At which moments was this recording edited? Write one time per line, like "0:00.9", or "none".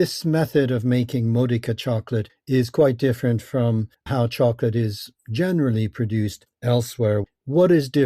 0:04.0
0:07.2